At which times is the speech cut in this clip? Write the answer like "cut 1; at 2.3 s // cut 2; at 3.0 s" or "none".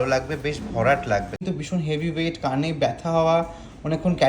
cut 1; at 1.4 s